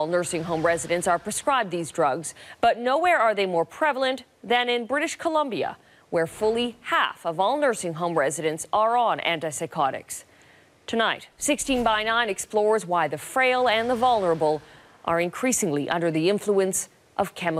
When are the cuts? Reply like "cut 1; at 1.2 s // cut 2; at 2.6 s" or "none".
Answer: cut 1; at 13.7 s